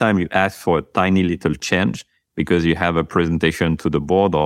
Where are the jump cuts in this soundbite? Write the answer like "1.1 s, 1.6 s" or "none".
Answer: none